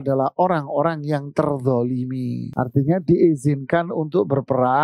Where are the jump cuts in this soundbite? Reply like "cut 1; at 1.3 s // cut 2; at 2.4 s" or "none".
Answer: cut 1; at 2.4 s